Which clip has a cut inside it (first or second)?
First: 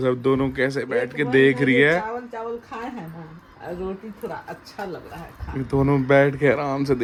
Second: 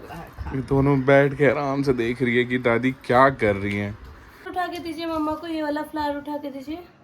second